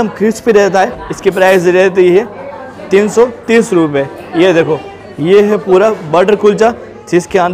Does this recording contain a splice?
yes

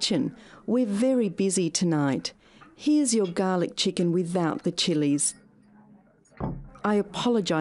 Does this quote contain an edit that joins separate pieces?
no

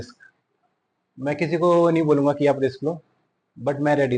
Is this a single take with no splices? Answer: yes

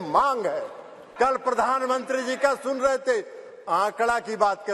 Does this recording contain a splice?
yes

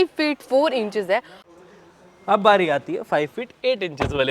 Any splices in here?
yes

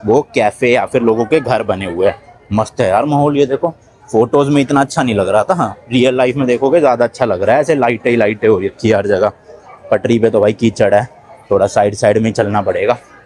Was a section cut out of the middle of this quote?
no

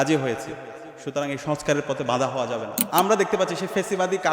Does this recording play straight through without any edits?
no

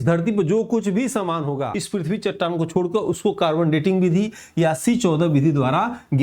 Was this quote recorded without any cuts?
no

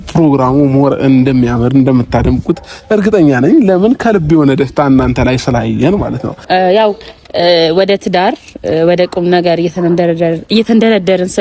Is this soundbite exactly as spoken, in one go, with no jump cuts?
no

